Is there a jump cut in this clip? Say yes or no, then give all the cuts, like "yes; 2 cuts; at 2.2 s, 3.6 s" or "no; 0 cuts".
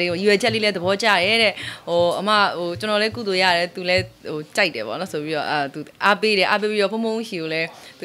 no; 0 cuts